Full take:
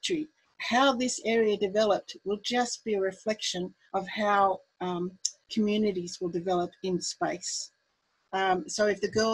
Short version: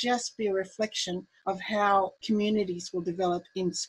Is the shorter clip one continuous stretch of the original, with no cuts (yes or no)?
no